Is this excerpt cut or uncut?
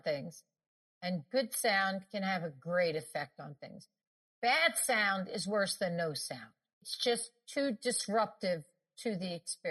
cut